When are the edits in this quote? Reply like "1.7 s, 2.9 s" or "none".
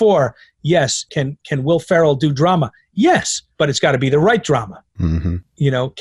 none

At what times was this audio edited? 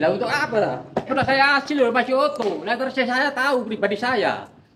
1.1 s

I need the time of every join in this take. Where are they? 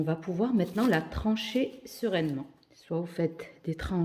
3.1 s

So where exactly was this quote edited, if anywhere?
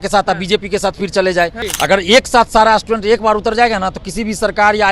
1.6 s

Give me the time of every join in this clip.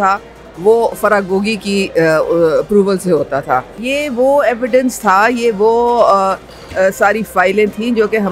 3.8 s

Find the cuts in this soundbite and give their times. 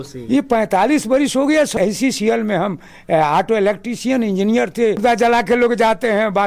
1.7 s, 5.0 s

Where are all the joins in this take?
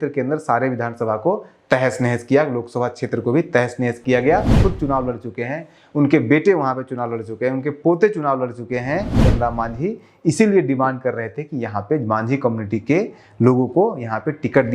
4.6 s, 9.2 s

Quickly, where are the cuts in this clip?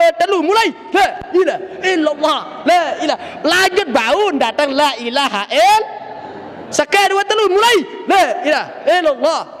none

